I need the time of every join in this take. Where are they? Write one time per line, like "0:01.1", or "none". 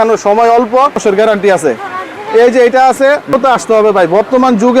0:01.0
0:03.3